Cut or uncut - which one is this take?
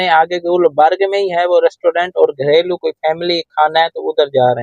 uncut